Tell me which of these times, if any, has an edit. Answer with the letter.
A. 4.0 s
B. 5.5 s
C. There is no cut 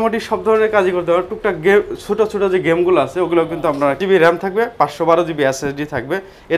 A